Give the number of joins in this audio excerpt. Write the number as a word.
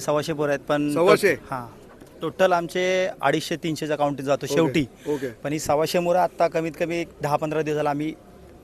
zero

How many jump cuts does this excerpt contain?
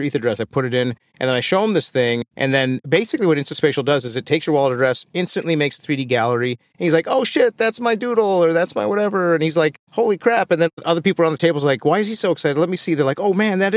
zero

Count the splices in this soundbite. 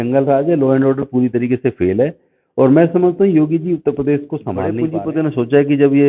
one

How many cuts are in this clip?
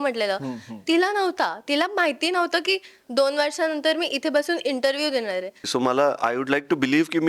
one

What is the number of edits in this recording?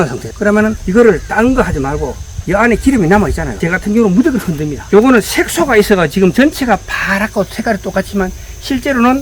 one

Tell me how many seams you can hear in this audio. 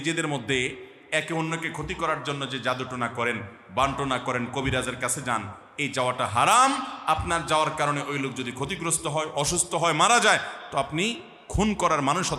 zero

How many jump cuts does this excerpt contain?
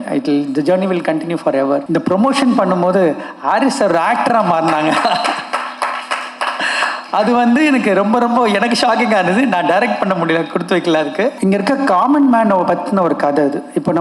two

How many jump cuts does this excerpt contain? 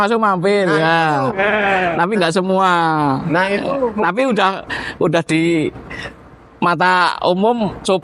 zero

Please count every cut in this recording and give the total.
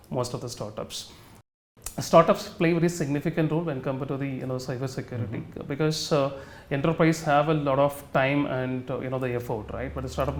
one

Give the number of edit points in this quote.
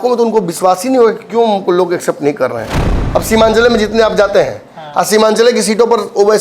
one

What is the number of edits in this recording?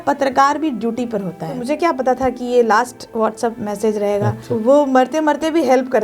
two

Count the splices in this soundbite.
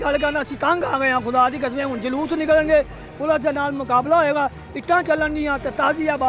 zero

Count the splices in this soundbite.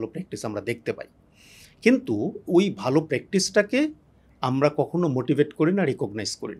zero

